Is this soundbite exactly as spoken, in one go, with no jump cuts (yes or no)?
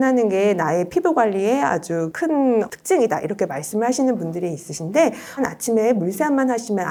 yes